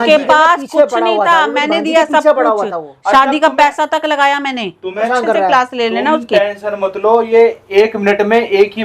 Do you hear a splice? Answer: yes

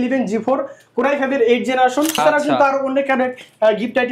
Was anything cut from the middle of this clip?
yes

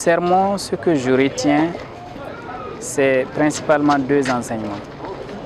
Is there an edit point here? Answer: no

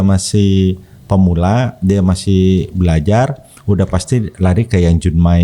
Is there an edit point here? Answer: no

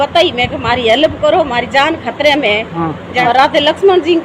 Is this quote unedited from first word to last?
no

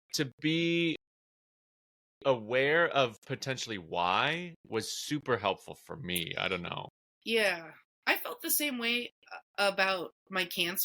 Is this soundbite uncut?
yes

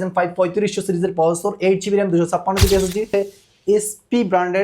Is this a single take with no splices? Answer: no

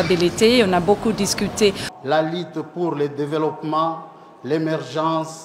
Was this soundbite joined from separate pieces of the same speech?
yes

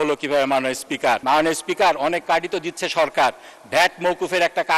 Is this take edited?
yes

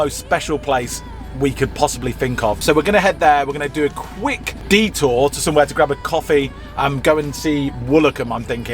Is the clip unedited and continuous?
yes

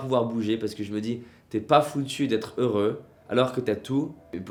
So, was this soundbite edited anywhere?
no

